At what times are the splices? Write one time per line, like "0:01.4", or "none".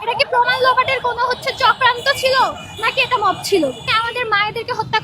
0:03.9